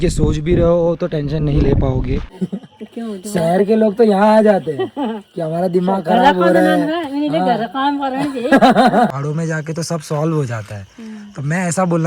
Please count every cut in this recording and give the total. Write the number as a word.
two